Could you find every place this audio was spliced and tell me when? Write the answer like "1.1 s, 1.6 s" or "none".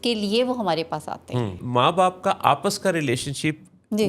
1.6 s

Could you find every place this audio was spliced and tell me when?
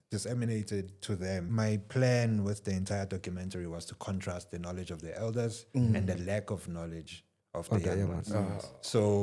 1.5 s

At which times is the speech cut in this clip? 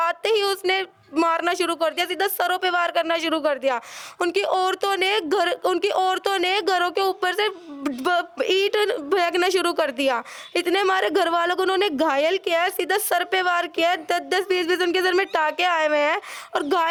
none

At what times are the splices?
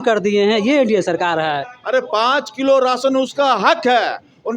1.7 s

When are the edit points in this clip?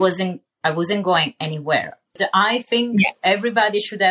2.1 s

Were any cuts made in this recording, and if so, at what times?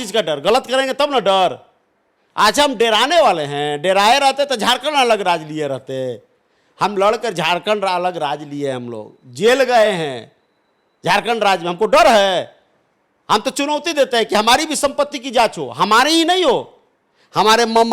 none

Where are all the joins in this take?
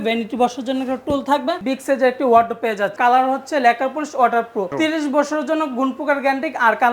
1.6 s, 2.9 s, 4.7 s

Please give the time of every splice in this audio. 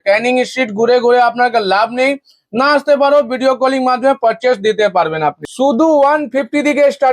5.4 s

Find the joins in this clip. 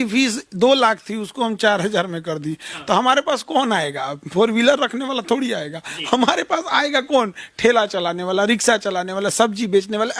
none

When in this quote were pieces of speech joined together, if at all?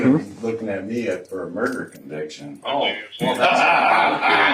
none

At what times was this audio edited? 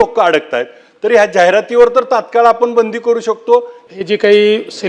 3.8 s

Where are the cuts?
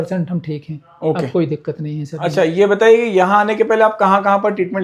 none

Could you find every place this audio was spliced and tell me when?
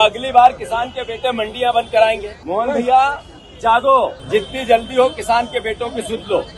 2.3 s, 4.2 s

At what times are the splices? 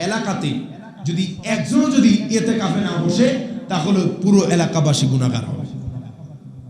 1.4 s

